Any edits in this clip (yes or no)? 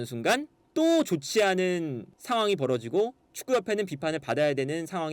no